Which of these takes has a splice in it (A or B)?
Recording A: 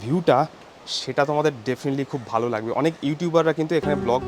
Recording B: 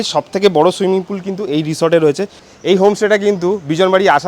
B